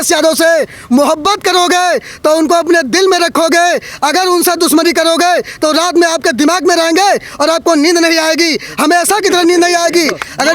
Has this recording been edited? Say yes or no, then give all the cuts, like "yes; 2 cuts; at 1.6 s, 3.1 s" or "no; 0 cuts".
no; 0 cuts